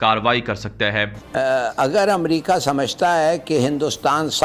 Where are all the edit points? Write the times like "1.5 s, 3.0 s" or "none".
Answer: 1.2 s